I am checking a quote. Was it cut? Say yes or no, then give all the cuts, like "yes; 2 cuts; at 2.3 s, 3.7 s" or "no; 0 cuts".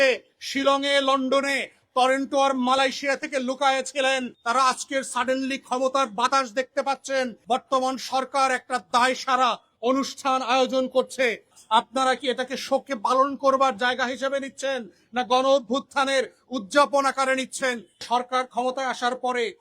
yes; 4 cuts; at 4.3 s, 7.4 s, 11.5 s, 18.0 s